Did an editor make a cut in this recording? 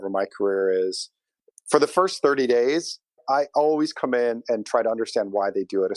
no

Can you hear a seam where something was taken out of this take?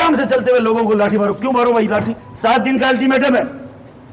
yes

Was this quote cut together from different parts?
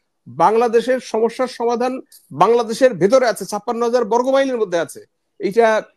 no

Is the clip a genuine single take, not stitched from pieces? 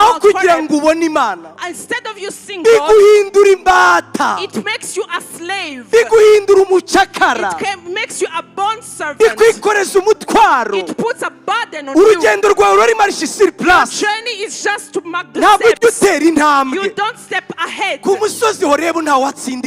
yes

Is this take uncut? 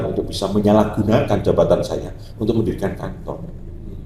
yes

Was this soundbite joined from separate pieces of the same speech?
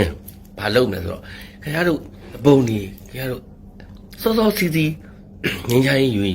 yes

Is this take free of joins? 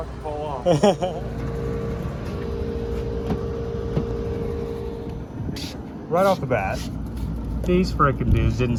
yes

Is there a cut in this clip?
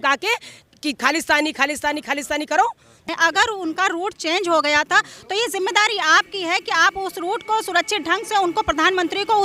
yes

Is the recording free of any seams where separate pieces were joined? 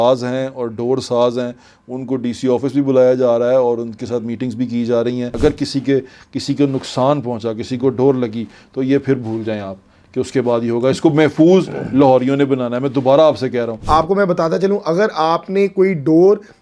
no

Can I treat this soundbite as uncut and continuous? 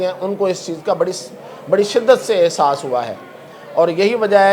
yes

